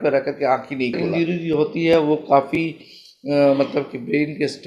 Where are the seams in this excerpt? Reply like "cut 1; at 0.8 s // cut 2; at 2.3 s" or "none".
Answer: cut 1; at 1.1 s